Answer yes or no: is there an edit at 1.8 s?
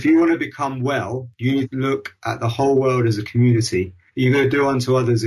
yes